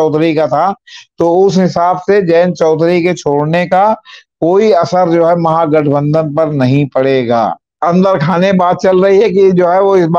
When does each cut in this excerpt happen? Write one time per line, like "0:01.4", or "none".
0:07.7